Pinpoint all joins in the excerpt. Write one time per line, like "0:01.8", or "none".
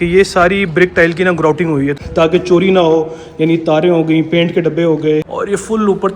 0:02.0
0:05.3